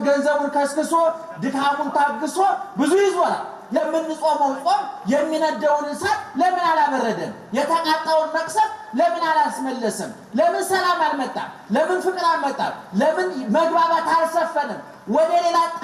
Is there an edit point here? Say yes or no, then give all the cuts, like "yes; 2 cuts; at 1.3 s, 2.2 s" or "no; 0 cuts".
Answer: yes; 1 cut; at 3.8 s